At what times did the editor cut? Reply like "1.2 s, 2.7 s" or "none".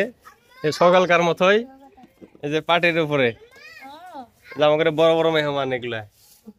none